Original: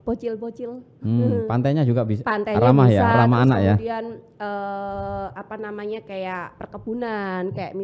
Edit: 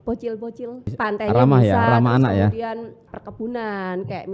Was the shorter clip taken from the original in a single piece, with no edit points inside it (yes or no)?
no